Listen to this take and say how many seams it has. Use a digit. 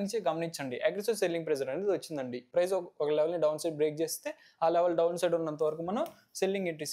1